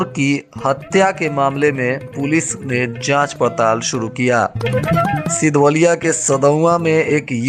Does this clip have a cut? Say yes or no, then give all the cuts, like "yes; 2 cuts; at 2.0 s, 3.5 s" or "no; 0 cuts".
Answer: no; 0 cuts